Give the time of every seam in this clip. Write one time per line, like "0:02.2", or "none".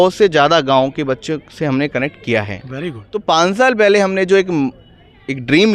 0:03.1